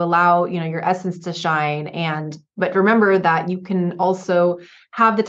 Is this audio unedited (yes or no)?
yes